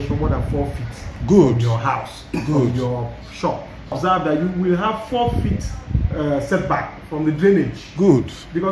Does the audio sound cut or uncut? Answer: cut